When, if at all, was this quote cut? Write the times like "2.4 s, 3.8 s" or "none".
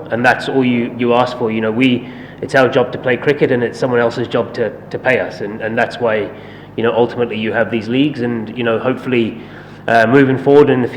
none